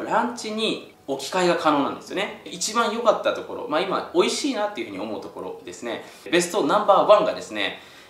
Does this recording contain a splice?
yes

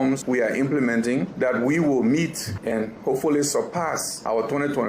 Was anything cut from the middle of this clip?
yes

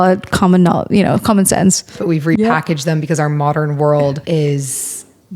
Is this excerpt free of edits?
no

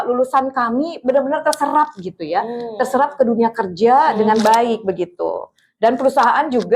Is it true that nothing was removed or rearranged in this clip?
yes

